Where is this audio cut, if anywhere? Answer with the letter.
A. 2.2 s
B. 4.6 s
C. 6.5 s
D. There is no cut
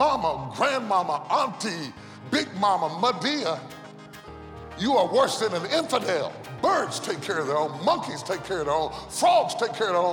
C